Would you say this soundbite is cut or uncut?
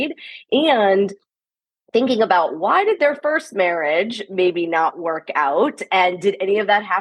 uncut